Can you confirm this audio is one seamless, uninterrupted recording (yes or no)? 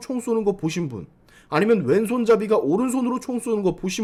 yes